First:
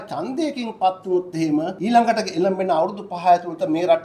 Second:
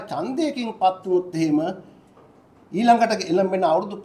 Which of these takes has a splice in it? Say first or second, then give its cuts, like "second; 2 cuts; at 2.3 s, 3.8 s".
first; 1 cut; at 1.7 s